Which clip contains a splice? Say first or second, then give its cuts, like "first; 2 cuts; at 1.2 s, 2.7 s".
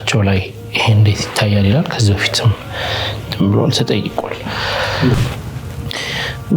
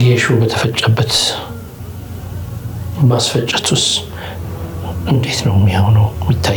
first; 1 cut; at 5.1 s